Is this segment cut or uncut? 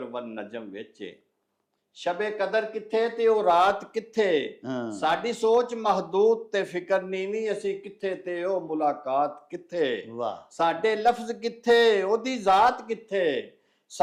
uncut